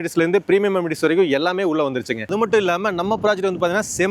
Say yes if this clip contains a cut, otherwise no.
no